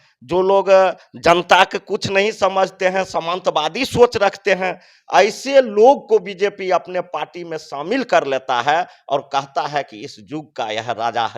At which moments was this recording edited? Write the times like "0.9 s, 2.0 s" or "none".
none